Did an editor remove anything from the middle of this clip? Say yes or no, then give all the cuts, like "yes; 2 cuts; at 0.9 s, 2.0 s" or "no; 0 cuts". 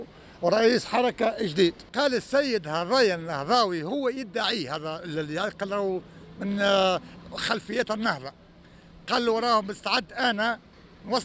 yes; 1 cut; at 1.8 s